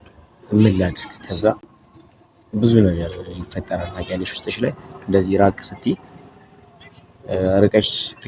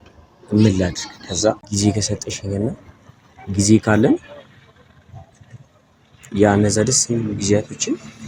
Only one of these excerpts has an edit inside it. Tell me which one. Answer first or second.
second